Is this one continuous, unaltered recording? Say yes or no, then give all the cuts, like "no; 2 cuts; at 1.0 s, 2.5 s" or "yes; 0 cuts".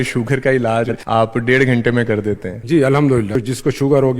no; 3 cuts; at 1.0 s, 2.5 s, 3.4 s